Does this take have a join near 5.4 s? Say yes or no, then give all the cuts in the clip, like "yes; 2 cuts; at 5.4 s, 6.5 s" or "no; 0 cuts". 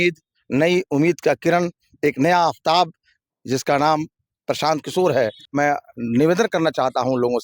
yes; 1 cut; at 5.4 s